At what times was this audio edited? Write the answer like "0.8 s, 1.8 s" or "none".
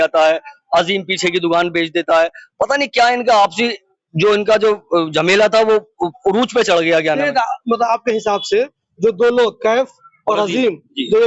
none